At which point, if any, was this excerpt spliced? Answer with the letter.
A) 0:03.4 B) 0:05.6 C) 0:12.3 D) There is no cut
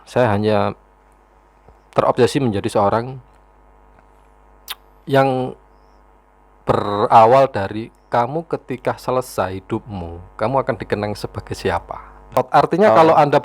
C